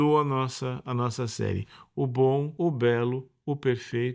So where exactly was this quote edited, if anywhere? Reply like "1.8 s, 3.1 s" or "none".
2.5 s